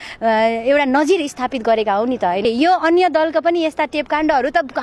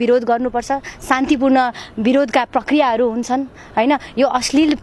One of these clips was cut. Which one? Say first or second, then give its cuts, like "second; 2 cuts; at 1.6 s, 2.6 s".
first; 1 cut; at 2.4 s